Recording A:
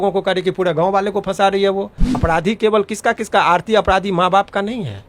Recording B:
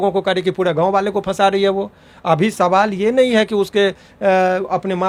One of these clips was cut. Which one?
A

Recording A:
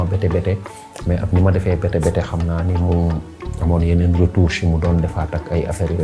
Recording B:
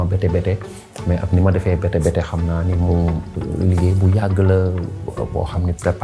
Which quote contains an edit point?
B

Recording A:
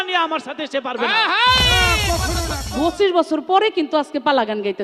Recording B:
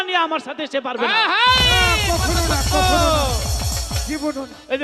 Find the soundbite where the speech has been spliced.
A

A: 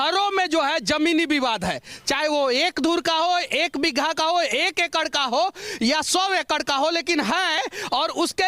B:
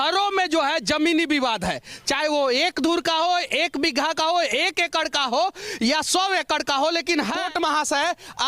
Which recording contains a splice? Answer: B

